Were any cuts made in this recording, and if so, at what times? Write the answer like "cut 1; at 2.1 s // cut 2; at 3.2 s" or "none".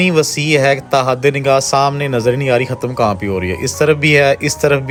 none